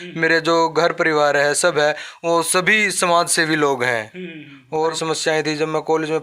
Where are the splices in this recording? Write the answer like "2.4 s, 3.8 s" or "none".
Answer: 4.9 s